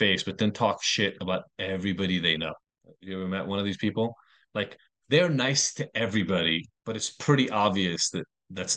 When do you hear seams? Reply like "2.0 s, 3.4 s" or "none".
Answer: 6.7 s